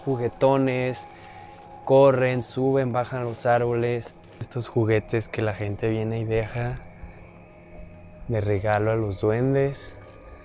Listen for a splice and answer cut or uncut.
cut